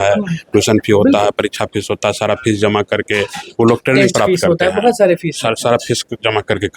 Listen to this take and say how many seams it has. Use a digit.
1